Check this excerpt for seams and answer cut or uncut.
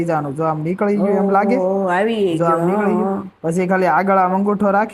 uncut